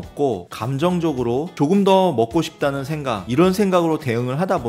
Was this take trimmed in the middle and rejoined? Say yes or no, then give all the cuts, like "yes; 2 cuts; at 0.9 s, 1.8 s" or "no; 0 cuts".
yes; 1 cut; at 3.3 s